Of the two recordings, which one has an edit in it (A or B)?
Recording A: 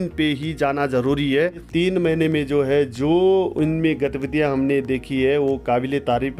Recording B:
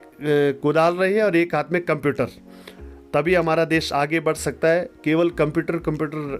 A